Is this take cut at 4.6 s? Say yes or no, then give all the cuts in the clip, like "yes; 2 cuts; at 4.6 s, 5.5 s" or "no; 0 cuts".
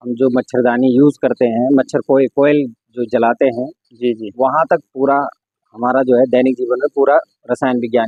no; 0 cuts